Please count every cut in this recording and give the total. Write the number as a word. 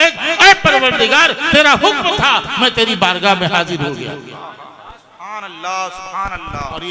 zero